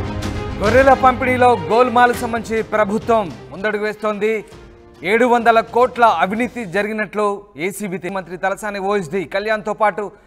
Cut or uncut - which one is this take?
cut